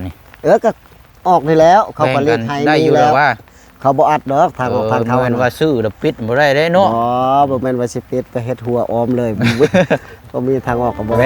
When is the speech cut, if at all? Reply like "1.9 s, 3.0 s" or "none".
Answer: none